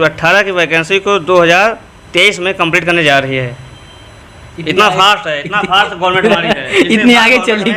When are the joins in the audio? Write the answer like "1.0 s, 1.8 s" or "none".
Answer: none